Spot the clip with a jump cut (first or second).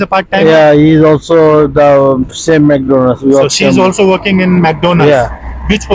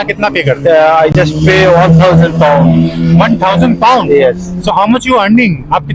second